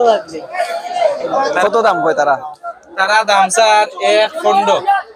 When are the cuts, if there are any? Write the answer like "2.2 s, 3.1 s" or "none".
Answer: 1.6 s